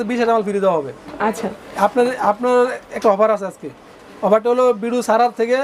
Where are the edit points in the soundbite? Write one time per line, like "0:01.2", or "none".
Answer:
0:01.5